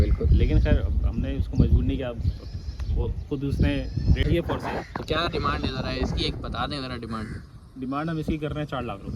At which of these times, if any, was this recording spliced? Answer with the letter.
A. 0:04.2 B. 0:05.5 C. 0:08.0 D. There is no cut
A